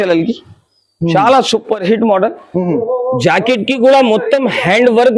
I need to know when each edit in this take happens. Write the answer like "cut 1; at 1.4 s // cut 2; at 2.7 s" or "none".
none

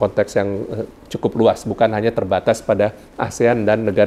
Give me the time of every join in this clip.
none

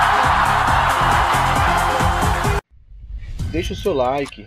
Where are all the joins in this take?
cut 1; at 2.6 s

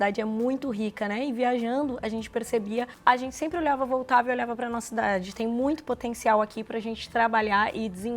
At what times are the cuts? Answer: cut 1; at 2.9 s

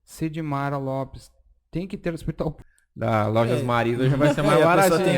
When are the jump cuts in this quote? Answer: cut 1; at 2.6 s

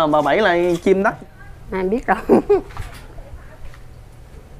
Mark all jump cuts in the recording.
cut 1; at 1.2 s

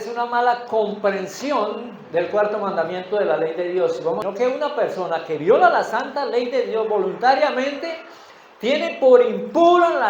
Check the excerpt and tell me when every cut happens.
cut 1; at 4.2 s

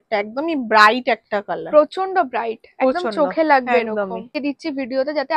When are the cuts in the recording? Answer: cut 1; at 4.4 s

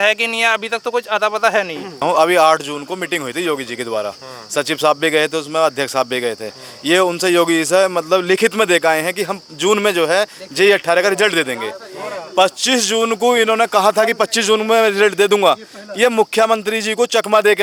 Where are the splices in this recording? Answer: none

